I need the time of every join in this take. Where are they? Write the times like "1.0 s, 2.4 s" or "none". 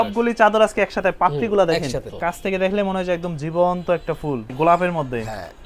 2.1 s, 4.5 s

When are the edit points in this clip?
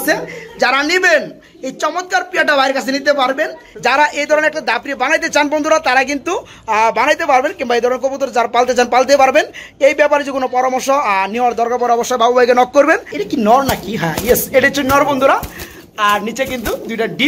3.6 s, 13.1 s

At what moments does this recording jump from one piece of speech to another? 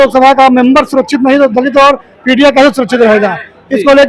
none

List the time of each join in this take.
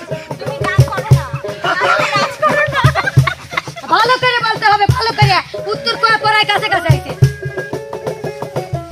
none

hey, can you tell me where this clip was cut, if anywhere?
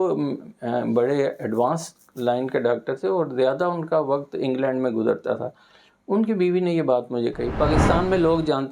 7.5 s

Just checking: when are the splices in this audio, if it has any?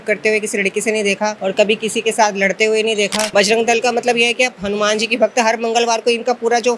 1.4 s, 3.2 s

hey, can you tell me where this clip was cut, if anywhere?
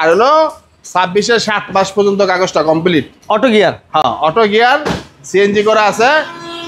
none

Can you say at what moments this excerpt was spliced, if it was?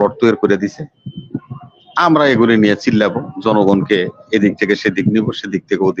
none

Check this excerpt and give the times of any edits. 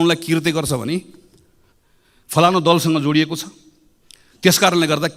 none

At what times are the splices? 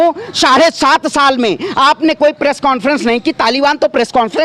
none

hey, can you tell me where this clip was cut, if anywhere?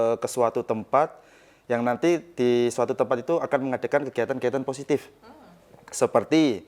none

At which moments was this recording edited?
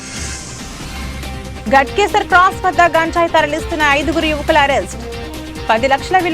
none

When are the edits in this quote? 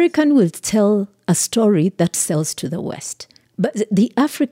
3.4 s

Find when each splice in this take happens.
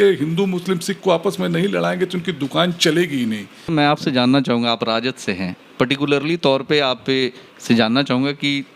3.7 s

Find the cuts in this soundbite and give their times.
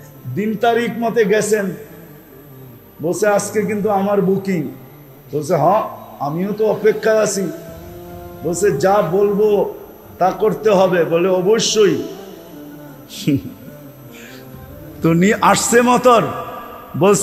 13.6 s, 15.0 s

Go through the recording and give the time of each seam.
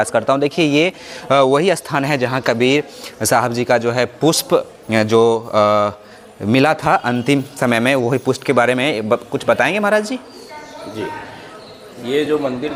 none

